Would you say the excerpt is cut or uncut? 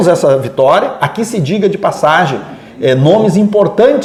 uncut